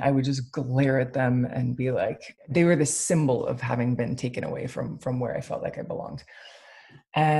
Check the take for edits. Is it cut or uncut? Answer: cut